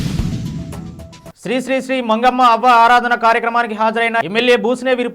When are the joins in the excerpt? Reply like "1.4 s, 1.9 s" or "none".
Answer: 1.2 s